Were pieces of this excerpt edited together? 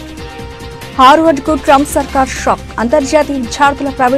yes; 1 cut; at 0.9 s

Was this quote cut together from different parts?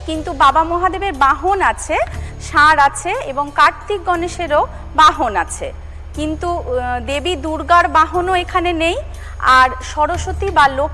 no; 0 cuts

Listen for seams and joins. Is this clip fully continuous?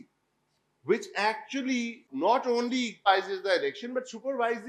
no; 2 cuts; at 2.0 s, 3.1 s

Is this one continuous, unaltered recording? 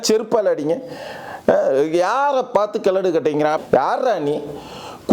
no; 1 cut; at 3.6 s

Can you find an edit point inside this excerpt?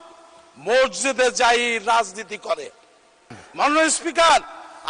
yes; 1 cut; at 3.4 s

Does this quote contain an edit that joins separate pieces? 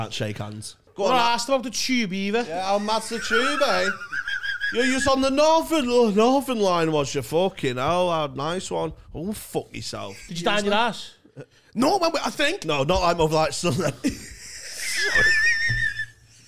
yes; 2 cuts; at 0.9 s, 10.3 s

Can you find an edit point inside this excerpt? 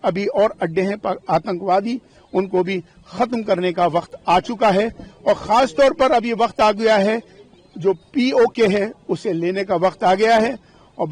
no; 0 cuts

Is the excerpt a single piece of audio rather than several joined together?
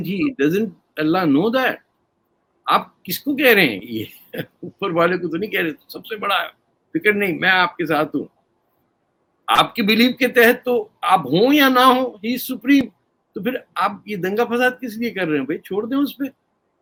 yes; 0 cuts

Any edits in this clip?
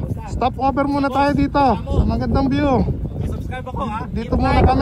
no; 0 cuts

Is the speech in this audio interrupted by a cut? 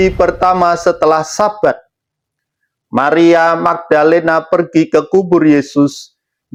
no; 0 cuts

